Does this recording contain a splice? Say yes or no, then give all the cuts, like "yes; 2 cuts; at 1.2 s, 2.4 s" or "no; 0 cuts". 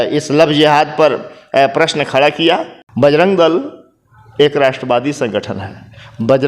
yes; 1 cut; at 2.8 s